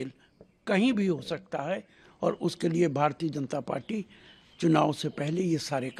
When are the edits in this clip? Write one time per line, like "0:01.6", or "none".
none